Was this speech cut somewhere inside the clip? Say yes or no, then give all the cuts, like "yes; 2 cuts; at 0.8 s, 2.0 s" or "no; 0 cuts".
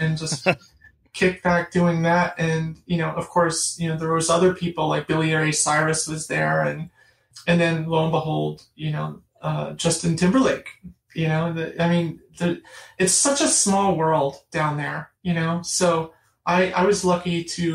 yes; 1 cut; at 7.2 s